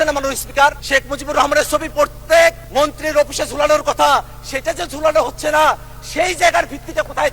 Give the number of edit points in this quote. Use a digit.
2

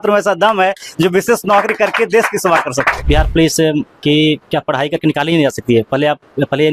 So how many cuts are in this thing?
1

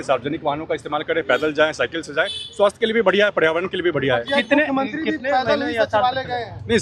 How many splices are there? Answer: 0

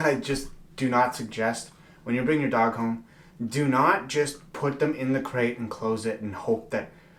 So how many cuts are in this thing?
0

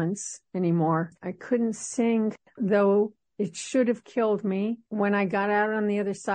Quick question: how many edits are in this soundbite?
2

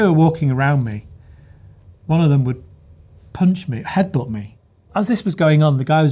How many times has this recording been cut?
1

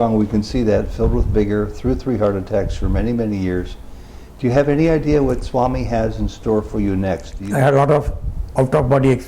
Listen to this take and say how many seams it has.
1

